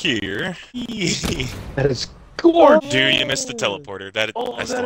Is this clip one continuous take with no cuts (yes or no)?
no